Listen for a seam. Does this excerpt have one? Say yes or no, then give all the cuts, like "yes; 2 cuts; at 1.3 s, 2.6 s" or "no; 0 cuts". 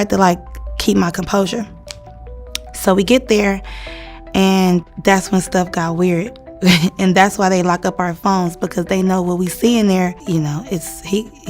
yes; 2 cuts; at 4.9 s, 10.2 s